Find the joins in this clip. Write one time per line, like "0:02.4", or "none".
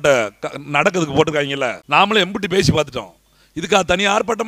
0:01.8